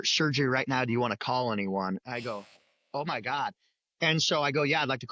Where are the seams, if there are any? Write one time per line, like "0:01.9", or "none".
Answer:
none